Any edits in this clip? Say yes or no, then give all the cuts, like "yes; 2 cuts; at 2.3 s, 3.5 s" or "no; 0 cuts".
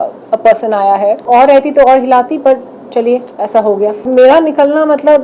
yes; 2 cuts; at 1.2 s, 4.0 s